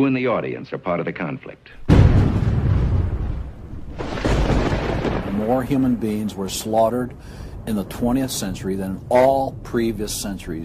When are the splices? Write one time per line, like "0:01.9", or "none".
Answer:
none